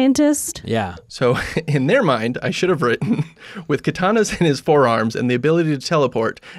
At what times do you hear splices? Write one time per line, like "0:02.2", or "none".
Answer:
0:01.0